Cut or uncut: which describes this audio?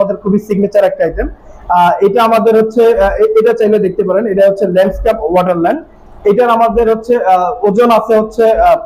uncut